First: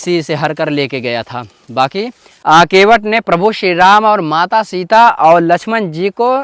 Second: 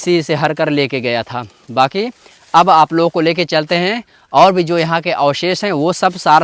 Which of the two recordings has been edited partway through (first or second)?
first